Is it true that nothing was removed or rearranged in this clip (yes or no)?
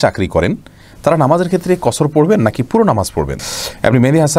no